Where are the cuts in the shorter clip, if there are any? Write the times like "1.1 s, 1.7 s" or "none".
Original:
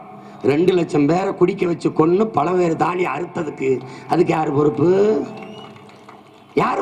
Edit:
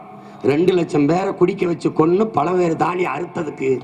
none

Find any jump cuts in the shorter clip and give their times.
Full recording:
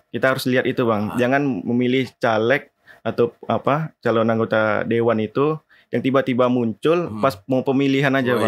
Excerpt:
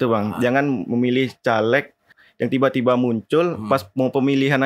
2.2 s

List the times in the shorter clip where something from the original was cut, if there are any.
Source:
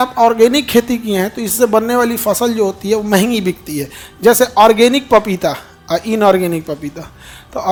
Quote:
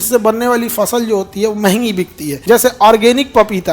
2.3 s

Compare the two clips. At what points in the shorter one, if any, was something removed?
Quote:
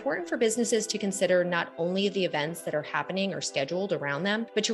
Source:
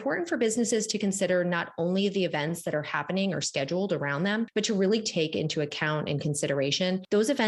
none

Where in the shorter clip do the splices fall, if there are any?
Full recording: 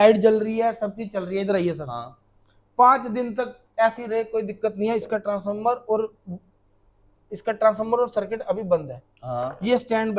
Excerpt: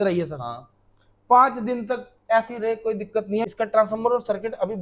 3.4 s

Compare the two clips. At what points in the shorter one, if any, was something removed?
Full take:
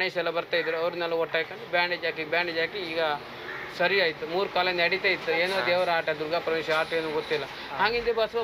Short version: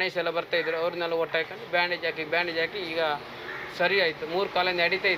none

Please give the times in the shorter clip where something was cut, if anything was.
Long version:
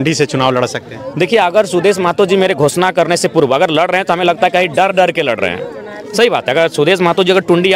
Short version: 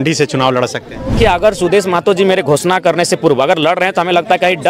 1.2 s

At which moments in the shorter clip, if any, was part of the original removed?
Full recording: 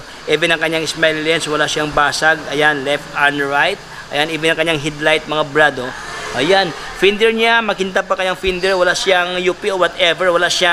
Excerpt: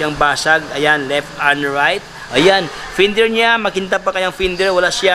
2.1 s

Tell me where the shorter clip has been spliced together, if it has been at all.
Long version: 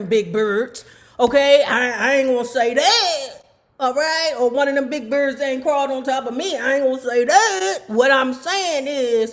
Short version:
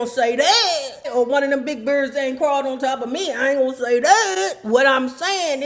1.1 s

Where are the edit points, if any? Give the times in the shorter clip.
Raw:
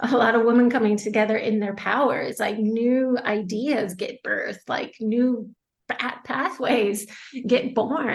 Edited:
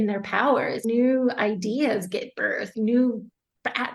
0.8 s, 2.7 s

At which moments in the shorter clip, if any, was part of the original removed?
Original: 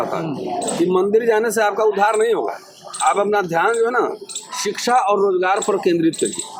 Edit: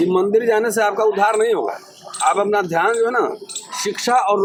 none

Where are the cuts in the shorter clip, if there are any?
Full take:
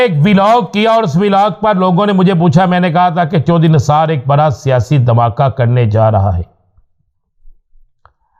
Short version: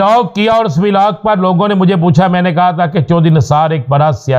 none

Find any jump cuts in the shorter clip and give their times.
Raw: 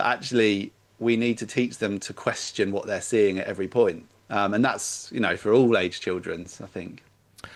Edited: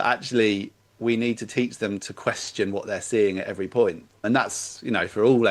4.2 s

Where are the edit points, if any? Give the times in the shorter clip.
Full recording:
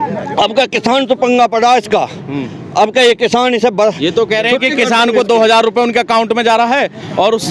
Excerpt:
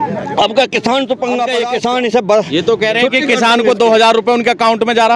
1.5 s

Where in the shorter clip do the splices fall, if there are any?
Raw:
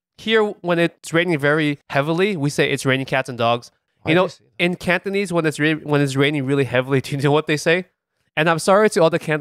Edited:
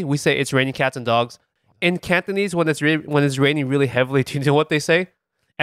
1.6 s

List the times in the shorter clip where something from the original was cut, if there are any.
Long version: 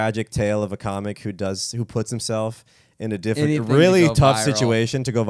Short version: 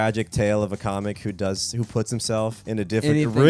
2.6 s

